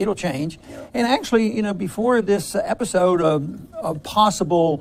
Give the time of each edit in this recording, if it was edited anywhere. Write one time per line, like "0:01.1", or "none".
none